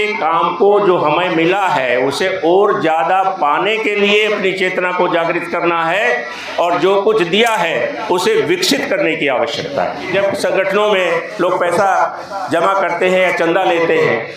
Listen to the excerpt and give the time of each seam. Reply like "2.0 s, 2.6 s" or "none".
10.1 s